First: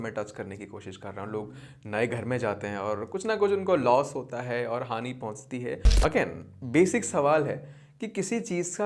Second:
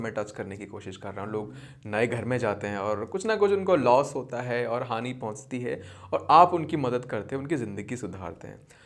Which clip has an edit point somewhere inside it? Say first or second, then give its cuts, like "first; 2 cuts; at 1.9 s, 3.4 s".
first; 1 cut; at 5.9 s